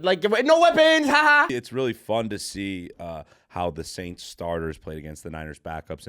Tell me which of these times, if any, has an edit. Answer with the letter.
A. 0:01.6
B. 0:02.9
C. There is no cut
A